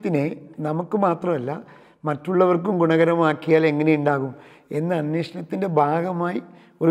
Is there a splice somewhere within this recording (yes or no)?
no